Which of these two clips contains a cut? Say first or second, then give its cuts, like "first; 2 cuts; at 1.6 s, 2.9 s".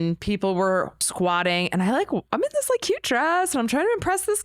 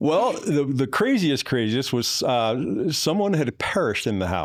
first; 1 cut; at 1.1 s